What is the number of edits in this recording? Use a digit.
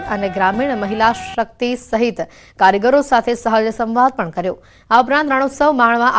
0